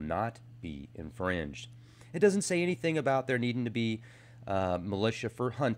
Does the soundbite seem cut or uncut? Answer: cut